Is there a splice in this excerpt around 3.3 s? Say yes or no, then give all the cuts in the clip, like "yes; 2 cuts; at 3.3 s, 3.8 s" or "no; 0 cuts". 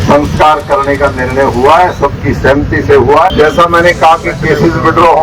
yes; 1 cut; at 3.3 s